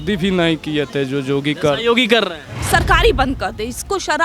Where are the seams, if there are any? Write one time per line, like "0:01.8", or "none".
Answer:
0:02.6